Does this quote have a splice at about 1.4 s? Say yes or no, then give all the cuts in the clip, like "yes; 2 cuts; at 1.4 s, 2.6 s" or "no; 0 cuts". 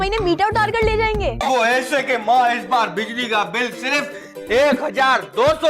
yes; 1 cut; at 1.4 s